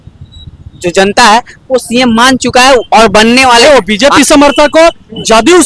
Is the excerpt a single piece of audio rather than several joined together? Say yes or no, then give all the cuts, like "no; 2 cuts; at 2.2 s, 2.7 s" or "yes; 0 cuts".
no; 1 cut; at 3.6 s